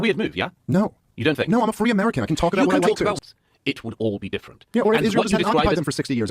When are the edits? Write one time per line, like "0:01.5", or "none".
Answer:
0:03.2